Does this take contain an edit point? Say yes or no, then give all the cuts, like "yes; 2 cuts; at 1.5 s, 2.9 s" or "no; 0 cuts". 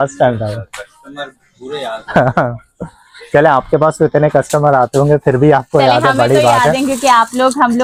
no; 0 cuts